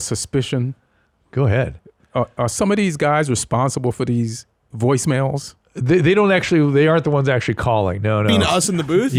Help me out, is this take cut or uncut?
uncut